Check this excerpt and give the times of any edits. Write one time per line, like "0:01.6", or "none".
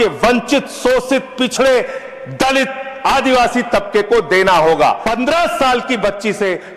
0:05.0